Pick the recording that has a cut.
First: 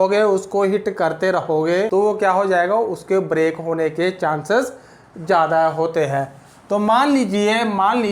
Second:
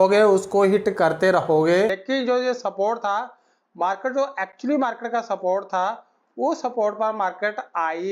second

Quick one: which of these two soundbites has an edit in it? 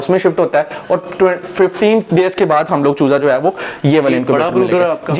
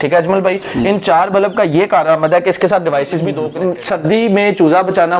second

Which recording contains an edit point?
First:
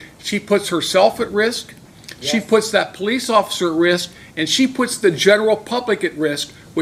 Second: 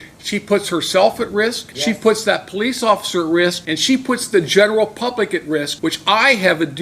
second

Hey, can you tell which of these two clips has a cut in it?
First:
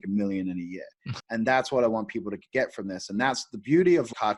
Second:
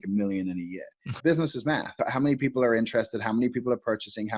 second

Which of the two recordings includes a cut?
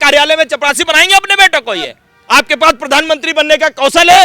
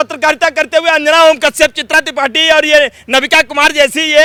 first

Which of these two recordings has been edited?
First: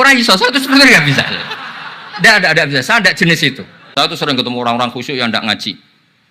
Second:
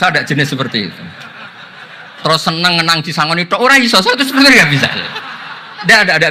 first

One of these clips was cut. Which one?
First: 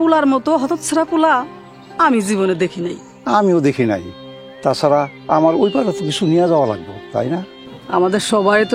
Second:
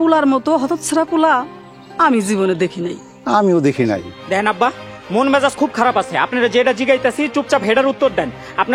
second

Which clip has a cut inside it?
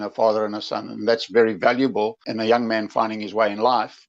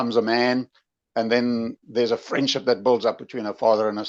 first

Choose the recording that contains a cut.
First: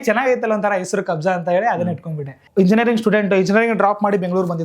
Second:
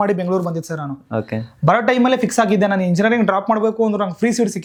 first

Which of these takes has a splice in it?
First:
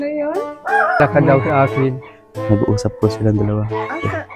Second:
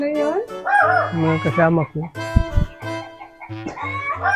first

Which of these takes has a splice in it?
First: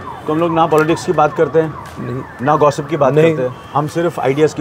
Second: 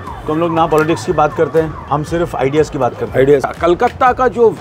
second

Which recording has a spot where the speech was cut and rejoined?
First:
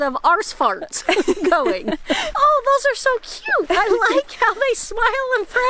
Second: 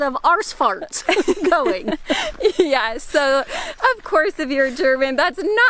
first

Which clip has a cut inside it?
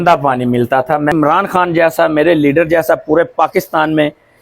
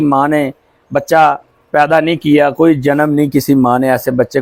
first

